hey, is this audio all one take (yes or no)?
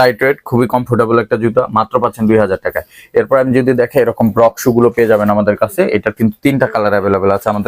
yes